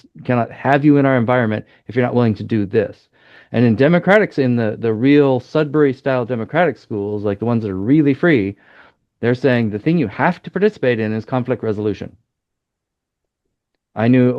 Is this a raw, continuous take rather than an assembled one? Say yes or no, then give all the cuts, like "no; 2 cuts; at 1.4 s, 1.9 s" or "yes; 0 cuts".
yes; 0 cuts